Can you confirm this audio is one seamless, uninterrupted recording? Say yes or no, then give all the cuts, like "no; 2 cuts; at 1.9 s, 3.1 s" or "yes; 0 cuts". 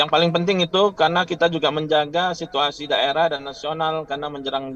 yes; 0 cuts